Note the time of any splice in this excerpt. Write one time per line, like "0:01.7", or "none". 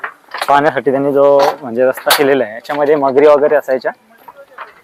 none

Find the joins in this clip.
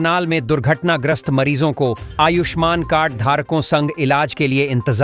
none

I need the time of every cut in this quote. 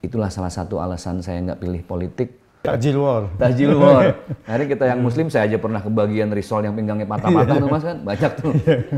0:02.7

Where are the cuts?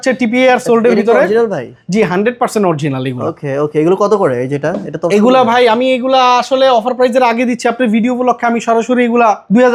none

